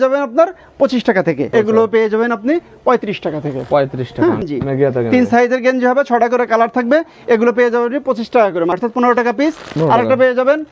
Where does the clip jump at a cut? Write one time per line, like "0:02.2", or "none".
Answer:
0:01.5
0:04.5
0:08.8